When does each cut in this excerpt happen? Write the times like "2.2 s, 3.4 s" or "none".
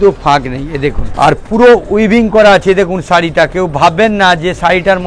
1.0 s